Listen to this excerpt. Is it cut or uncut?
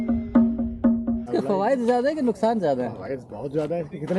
cut